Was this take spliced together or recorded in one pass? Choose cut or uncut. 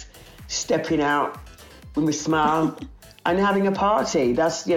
uncut